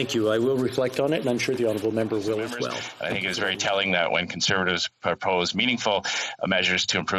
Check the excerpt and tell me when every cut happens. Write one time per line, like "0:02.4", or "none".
0:02.9